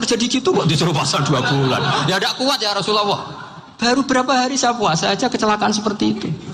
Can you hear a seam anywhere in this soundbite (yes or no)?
no